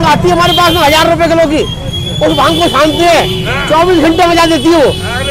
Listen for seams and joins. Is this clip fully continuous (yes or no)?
yes